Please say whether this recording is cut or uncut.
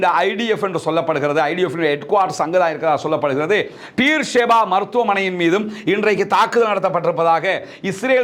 uncut